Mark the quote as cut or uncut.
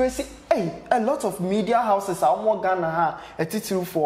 uncut